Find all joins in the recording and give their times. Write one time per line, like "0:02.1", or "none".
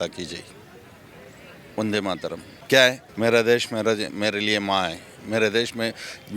0:02.5
0:03.1